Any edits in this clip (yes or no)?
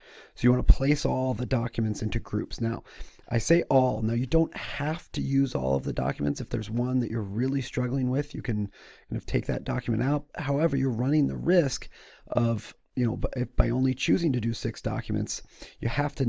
yes